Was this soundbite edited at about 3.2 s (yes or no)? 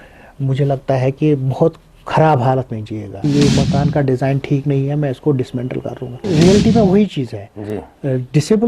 yes